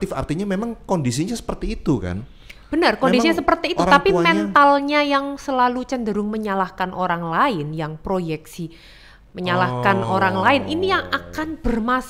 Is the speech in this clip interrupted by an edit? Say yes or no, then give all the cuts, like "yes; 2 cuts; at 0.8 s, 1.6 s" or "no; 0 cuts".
no; 0 cuts